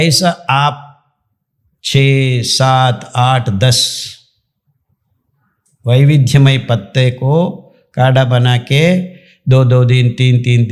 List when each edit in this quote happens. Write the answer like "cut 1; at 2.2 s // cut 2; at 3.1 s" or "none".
none